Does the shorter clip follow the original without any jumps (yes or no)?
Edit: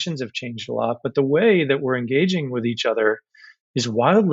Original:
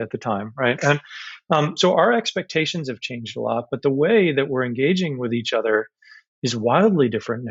yes